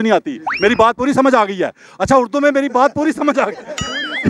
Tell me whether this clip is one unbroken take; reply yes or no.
yes